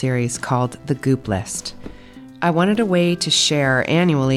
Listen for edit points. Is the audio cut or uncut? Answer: uncut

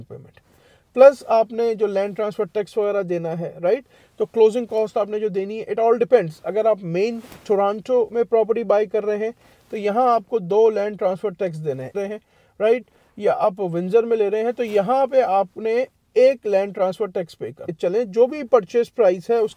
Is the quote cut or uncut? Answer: cut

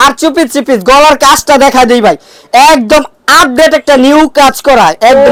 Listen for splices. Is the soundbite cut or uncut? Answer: uncut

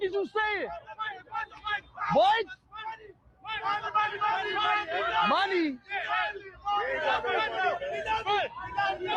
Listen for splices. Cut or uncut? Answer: uncut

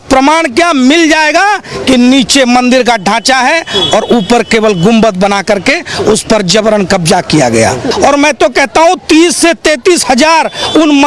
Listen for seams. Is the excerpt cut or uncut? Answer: cut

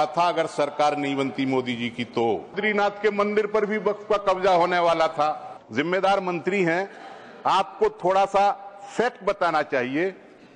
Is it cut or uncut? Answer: cut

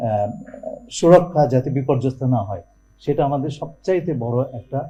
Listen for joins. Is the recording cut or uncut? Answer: uncut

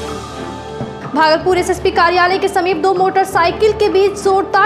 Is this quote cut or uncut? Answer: cut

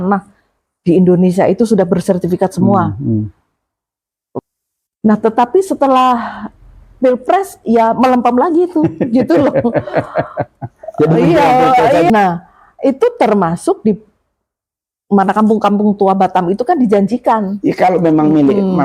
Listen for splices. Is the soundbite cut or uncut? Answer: cut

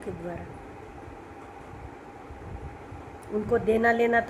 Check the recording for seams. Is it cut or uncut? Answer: uncut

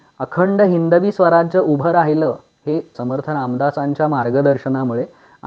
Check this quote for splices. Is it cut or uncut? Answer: cut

